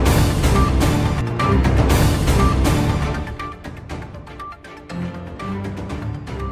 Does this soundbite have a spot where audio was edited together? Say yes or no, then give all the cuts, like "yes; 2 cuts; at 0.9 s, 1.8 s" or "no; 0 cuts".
no; 0 cuts